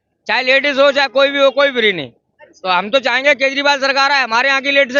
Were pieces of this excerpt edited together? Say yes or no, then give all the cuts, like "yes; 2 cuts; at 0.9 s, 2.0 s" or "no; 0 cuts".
no; 0 cuts